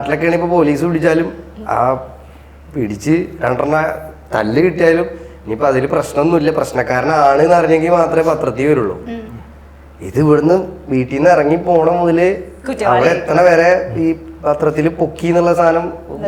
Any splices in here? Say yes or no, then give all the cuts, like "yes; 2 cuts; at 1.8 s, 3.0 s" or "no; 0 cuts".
no; 0 cuts